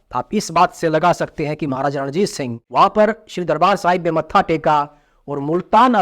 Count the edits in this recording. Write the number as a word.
one